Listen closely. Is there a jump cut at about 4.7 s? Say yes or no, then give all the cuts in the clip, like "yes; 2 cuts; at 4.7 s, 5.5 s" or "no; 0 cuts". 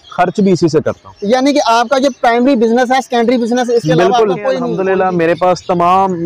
yes; 1 cut; at 4.7 s